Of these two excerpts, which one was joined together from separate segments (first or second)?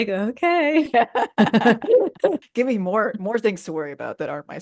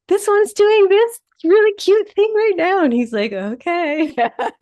first